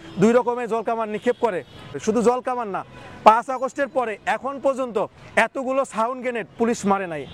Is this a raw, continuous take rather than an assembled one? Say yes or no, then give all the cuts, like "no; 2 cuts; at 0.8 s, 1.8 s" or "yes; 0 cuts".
no; 1 cut; at 2.0 s